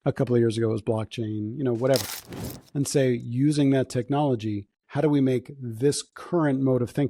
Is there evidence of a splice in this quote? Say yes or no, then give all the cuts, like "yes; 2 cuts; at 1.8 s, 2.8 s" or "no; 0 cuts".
no; 0 cuts